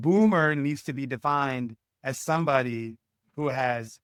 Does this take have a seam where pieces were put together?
no; 0 cuts

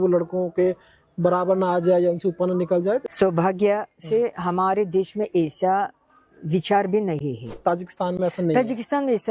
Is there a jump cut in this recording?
yes; 2 cuts; at 3.1 s, 7.6 s

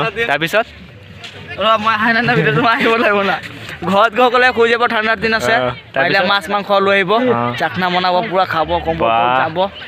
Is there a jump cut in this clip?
no; 0 cuts

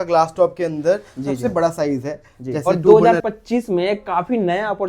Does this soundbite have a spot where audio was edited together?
yes; 1 cut; at 2.6 s

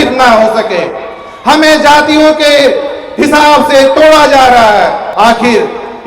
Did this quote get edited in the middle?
yes; 1 cut; at 5.0 s

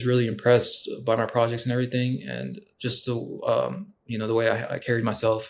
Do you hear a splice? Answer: no; 0 cuts

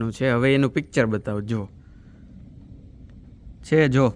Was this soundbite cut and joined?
no; 0 cuts

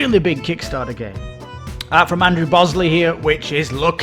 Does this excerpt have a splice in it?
yes; 1 cut; at 1.5 s

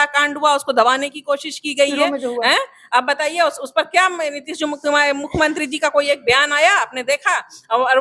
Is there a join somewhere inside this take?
no; 0 cuts

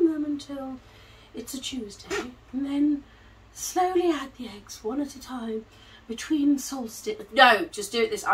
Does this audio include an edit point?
no; 0 cuts

